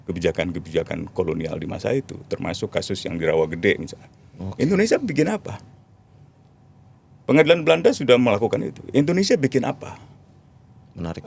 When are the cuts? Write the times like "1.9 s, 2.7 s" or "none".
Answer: none